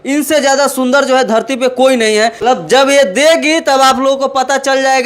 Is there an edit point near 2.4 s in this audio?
yes; 1 cut; at 2.4 s

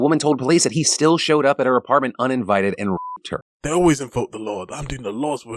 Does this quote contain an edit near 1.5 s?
no; 1 cut; at 3.3 s

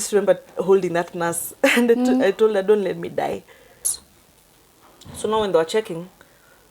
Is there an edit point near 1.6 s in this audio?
no; 1 cut; at 3.9 s

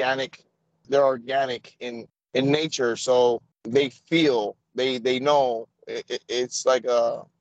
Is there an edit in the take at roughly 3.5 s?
yes; 1 cut; at 3.5 s

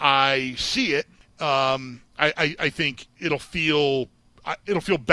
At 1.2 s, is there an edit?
yes; 2 cuts; at 1.2 s, 3.0 s

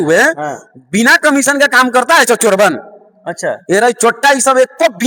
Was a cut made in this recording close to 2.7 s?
no; 0 cuts

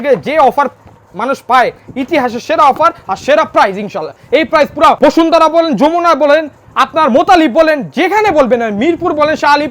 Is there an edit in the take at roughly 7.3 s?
no; 1 cut; at 5.0 s

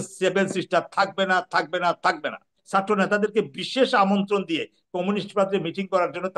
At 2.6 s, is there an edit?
yes; 1 cut; at 2.6 s

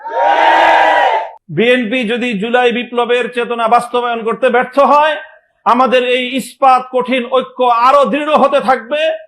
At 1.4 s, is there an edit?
yes; 1 cut; at 1.4 s

